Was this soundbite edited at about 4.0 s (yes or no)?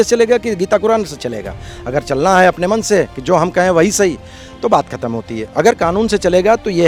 no